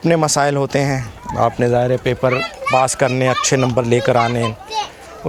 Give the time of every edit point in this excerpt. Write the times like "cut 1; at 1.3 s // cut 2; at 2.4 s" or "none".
none